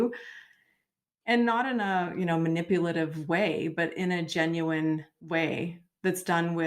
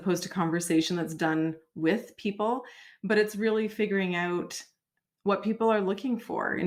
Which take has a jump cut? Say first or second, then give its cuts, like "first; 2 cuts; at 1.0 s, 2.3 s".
first; 1 cut; at 5.2 s